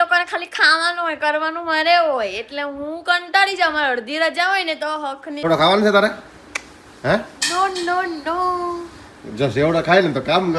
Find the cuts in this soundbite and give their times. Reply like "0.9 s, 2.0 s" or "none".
5.4 s